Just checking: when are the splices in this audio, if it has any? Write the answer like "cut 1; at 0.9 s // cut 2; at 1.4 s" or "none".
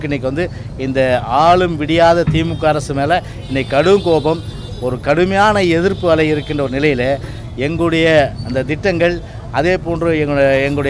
none